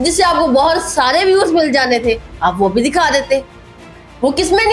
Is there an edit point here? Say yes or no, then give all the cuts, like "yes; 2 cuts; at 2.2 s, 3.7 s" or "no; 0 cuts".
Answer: no; 0 cuts